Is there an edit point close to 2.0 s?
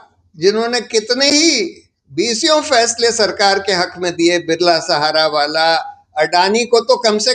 no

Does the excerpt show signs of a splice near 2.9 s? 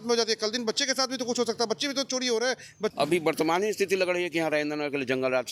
yes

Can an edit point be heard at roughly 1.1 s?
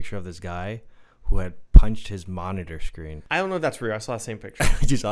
no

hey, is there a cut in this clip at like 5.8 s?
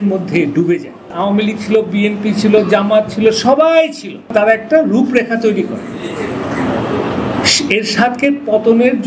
no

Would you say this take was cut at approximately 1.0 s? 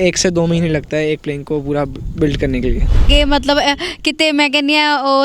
no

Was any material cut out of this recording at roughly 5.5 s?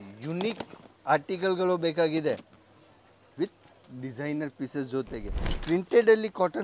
yes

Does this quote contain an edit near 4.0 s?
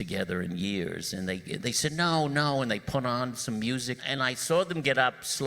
yes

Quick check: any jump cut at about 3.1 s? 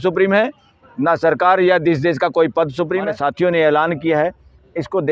yes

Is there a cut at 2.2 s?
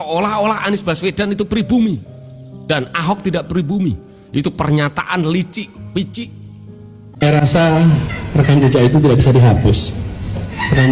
no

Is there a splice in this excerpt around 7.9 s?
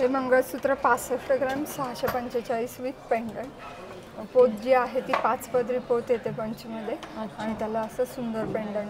no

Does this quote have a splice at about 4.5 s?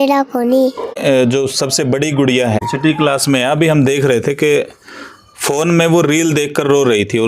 no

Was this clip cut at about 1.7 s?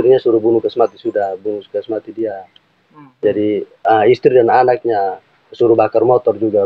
no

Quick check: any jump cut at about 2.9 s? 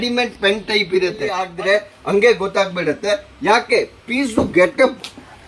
no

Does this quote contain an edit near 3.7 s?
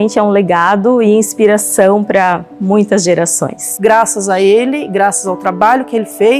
yes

